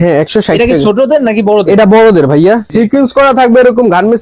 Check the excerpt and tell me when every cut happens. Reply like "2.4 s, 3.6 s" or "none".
2.7 s